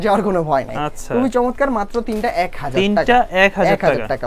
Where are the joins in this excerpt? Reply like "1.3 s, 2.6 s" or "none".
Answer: none